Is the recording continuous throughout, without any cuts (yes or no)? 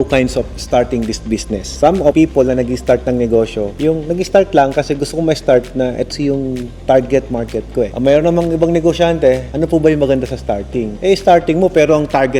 yes